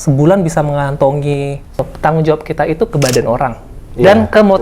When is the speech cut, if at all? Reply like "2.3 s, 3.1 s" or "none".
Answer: 1.9 s